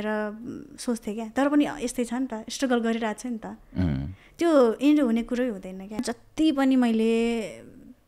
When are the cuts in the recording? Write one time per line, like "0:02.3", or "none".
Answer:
0:06.2